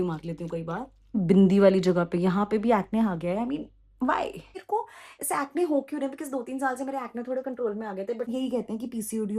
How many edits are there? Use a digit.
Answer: 3